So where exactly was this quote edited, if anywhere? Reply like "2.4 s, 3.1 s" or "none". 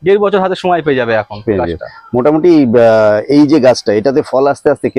none